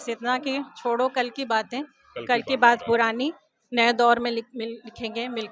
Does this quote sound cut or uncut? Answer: uncut